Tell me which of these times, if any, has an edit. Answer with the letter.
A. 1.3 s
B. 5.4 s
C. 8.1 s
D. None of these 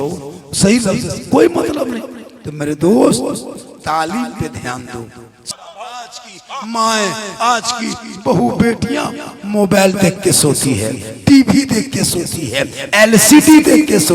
B